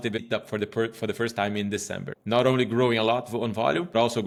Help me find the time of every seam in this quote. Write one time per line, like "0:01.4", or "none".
none

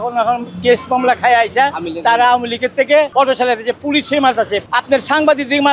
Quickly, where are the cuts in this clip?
0:03.1
0:04.7

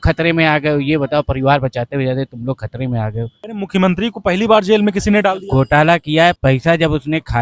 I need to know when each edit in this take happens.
0:03.4
0:06.4

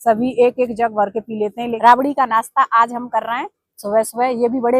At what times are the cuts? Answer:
0:01.7

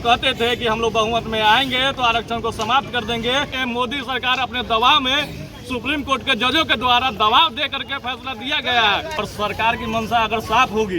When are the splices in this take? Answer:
0:03.5
0:09.2

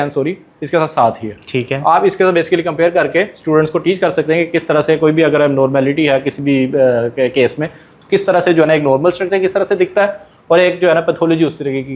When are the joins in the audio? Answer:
none

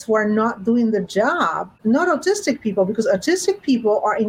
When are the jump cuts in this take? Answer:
0:01.8

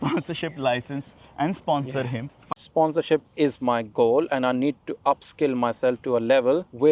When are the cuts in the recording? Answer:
0:02.3

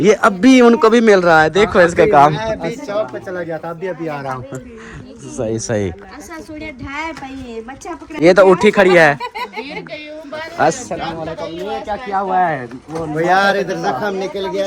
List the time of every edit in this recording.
none

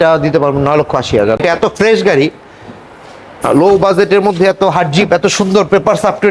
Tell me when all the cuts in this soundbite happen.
0:01.4

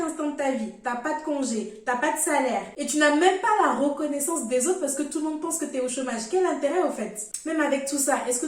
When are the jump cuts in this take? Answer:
0:07.2

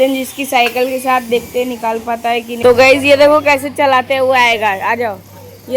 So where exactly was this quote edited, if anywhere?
0:02.5

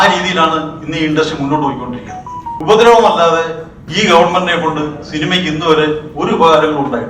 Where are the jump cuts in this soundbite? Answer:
0:02.5

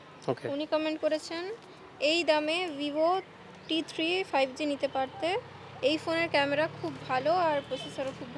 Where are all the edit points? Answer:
none

